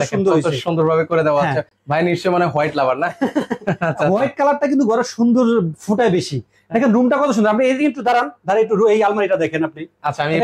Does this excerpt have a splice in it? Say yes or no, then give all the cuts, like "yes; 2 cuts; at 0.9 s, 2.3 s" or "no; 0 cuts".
no; 0 cuts